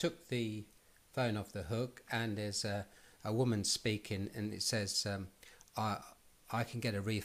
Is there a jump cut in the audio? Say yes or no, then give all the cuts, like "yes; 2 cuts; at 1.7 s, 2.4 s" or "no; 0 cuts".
no; 0 cuts